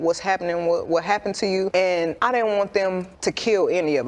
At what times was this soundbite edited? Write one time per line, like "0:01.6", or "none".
0:01.8
0:03.1